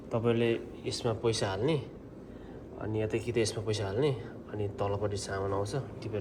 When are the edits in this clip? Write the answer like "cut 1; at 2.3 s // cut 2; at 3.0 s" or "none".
none